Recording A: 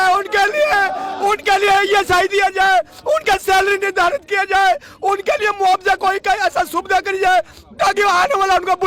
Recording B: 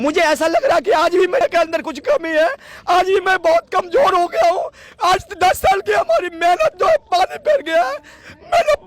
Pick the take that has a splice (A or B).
B